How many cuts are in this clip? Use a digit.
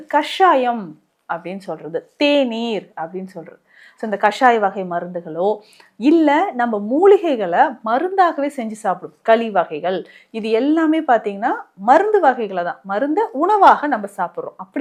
0